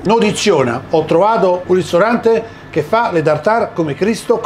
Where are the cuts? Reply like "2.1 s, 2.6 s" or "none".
1.6 s